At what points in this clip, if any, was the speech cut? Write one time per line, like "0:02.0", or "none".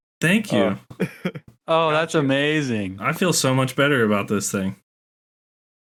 none